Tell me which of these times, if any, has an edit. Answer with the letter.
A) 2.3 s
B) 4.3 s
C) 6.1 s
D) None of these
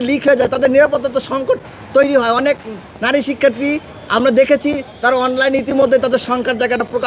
D